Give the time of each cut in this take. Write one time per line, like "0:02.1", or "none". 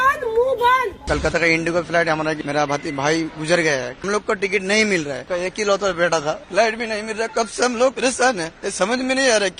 0:01.0
0:05.2